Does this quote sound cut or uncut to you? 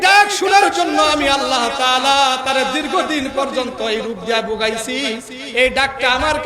uncut